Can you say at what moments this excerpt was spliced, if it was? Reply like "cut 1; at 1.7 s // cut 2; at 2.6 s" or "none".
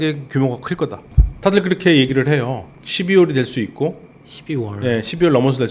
none